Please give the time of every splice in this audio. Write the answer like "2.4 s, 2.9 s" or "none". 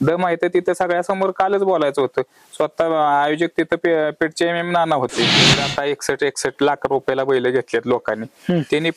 5.6 s